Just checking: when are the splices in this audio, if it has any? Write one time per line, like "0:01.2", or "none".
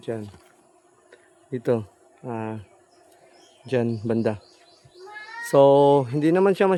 none